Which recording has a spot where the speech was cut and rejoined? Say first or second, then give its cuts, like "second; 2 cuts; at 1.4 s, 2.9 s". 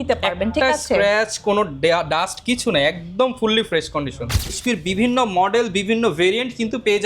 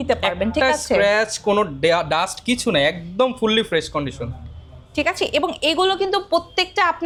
first; 1 cut; at 4.6 s